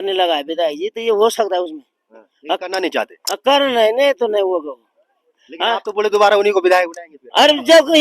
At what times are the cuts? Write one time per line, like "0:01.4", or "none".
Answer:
none